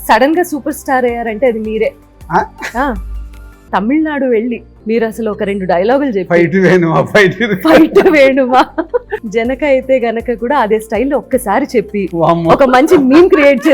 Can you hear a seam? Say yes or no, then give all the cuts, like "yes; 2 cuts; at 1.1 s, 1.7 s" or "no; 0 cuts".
yes; 3 cuts; at 3.6 s, 4.7 s, 9.2 s